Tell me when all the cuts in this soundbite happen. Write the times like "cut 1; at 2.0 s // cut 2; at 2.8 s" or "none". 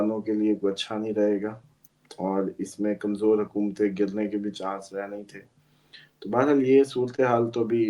none